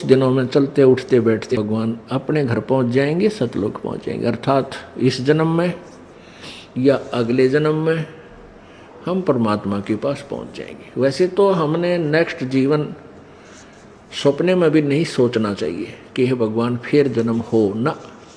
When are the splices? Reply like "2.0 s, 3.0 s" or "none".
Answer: 1.5 s